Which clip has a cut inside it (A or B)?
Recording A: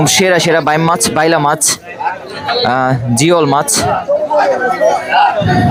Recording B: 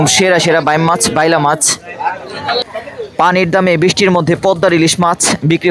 B